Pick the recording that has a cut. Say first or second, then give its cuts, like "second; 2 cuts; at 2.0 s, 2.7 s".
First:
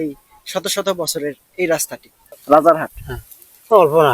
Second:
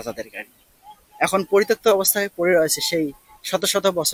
first; 1 cut; at 2.2 s